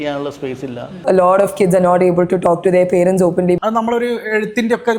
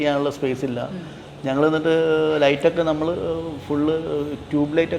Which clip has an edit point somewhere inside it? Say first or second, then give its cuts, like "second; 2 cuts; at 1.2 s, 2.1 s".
first; 2 cuts; at 1.0 s, 3.6 s